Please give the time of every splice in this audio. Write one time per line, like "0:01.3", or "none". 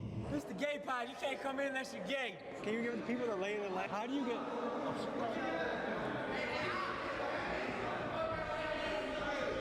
0:03.9